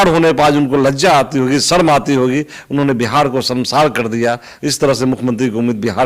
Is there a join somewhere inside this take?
no; 0 cuts

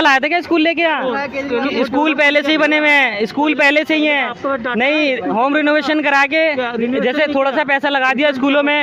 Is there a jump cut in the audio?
no; 0 cuts

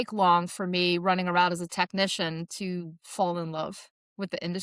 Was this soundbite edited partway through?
no; 0 cuts

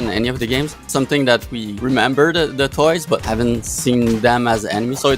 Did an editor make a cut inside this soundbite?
yes; 3 cuts; at 0.8 s, 1.6 s, 3.2 s

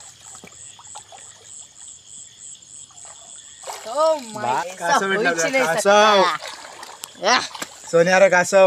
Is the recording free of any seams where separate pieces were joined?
no; 1 cut; at 4.6 s

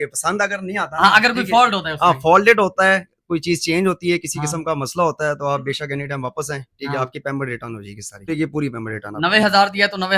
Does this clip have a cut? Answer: yes; 1 cut; at 8.3 s

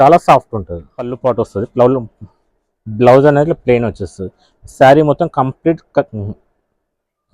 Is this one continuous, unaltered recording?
no; 1 cut; at 1.1 s

